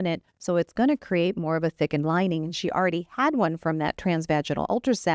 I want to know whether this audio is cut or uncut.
uncut